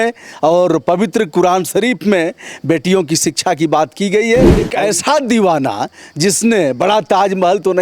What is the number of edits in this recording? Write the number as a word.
one